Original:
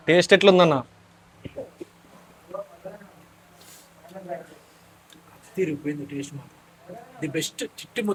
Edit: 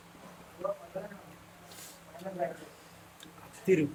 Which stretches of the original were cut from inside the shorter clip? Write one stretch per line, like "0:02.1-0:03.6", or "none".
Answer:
none